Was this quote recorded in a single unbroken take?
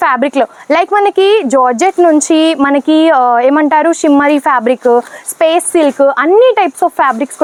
yes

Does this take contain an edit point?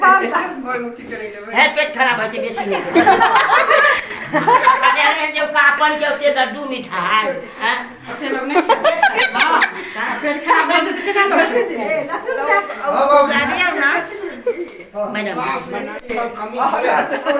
no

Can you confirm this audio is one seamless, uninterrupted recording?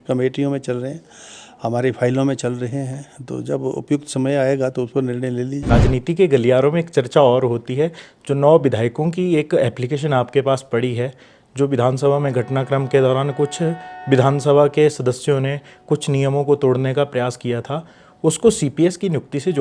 no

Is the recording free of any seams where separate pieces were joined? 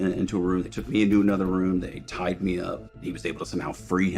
no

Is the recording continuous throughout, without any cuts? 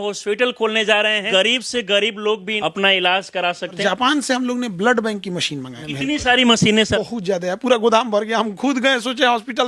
no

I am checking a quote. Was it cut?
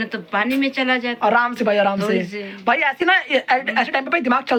no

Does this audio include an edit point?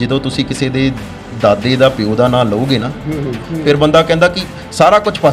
yes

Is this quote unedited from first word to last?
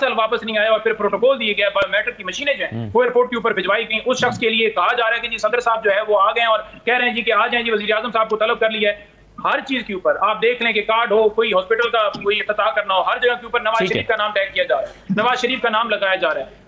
yes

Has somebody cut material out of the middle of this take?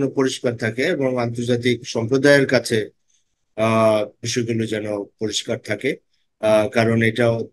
no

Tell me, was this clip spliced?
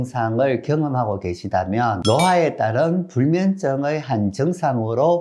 no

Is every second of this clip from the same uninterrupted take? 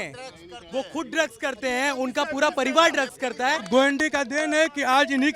no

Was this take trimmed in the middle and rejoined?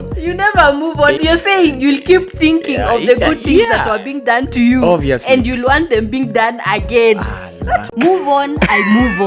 yes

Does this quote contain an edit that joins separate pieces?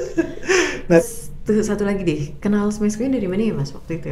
yes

